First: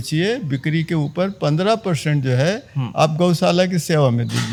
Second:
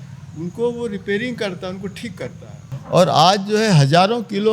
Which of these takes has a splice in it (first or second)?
second